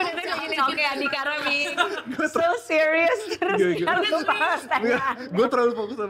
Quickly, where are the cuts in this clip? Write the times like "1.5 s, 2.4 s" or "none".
none